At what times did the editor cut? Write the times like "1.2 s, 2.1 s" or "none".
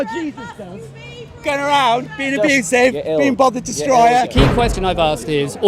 4.3 s